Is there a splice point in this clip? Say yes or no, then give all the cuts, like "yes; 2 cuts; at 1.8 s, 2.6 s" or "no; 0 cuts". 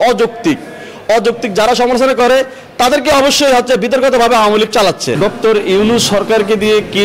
yes; 1 cut; at 5.1 s